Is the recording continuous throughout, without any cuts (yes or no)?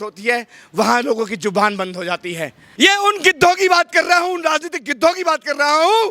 no